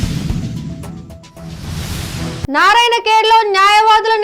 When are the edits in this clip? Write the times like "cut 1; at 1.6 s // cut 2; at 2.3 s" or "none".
cut 1; at 2.5 s